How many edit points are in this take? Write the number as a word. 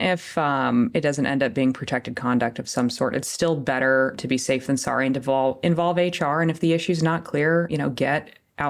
zero